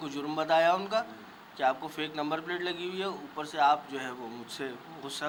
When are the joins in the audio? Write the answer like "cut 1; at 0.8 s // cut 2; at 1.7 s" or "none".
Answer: none